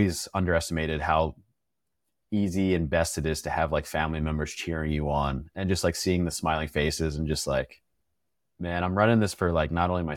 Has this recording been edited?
no; 0 cuts

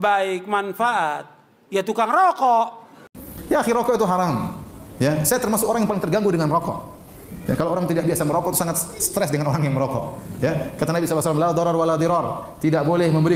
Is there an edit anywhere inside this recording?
yes; 1 cut; at 3.3 s

